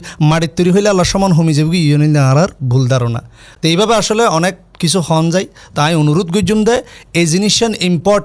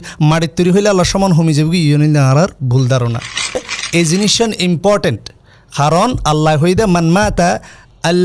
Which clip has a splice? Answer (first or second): second